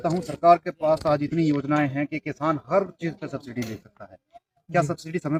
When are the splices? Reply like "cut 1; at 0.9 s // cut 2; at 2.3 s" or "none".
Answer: none